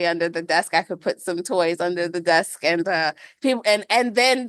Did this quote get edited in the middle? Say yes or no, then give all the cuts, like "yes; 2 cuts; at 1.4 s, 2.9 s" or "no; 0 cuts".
no; 0 cuts